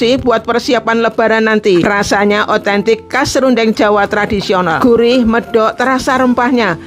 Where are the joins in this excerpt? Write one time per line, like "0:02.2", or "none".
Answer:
0:01.8
0:04.9